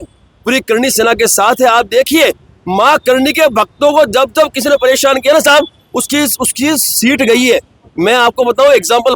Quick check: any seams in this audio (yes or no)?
no